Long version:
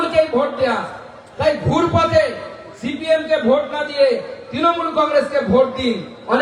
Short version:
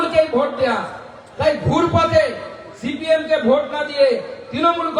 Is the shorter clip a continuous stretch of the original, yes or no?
yes